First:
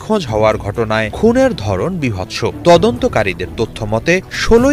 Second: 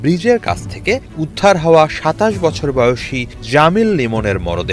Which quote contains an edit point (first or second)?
first